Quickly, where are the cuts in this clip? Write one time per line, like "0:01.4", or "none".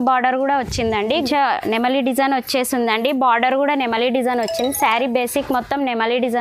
0:01.1